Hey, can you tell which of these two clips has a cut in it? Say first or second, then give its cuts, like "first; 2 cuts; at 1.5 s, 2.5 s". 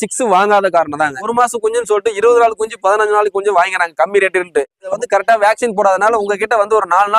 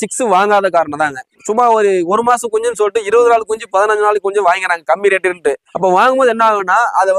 first; 2 cuts; at 1.3 s, 4.9 s